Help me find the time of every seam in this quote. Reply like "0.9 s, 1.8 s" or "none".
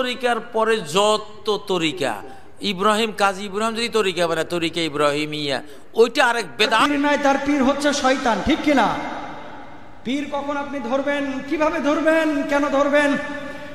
6.8 s